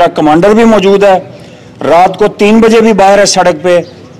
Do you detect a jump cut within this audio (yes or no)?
no